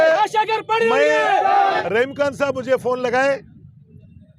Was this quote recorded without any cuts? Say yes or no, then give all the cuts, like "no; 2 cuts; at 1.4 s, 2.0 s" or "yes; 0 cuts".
no; 1 cut; at 1.8 s